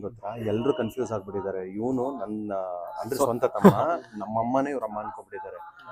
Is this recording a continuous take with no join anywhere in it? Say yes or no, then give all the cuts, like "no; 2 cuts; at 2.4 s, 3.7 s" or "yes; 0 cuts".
yes; 0 cuts